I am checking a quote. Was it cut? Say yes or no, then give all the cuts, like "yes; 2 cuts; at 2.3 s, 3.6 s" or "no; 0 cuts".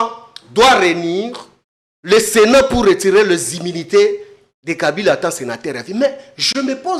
no; 0 cuts